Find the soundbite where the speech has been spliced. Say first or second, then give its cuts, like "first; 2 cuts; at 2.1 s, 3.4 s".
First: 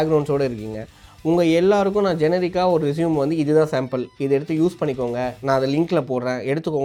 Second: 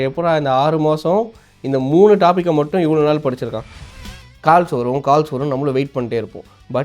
second; 1 cut; at 3.9 s